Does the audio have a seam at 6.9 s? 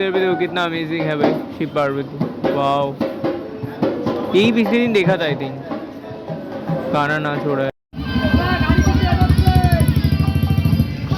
no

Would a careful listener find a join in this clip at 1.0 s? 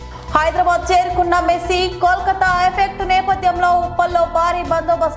no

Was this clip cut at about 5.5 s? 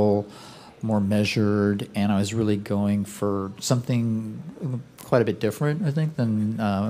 no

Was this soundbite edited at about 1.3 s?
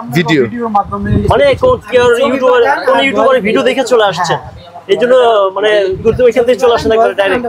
no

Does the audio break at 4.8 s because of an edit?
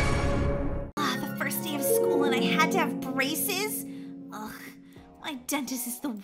no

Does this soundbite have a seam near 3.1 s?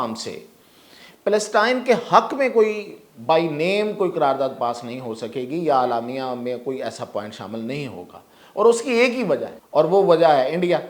no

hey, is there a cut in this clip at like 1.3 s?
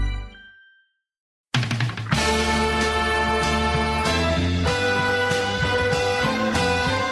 yes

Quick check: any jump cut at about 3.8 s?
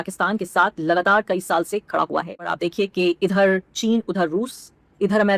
no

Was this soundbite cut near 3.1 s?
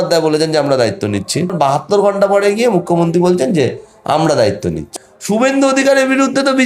no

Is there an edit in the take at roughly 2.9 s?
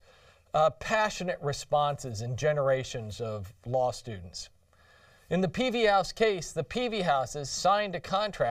yes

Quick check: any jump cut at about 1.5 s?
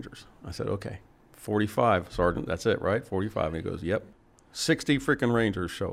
no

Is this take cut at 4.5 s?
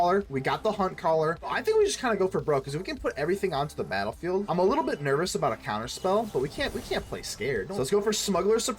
yes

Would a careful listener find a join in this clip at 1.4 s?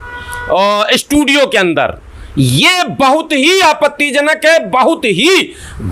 no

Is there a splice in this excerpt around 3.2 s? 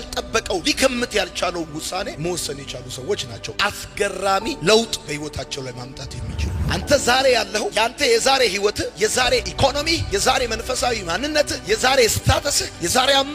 no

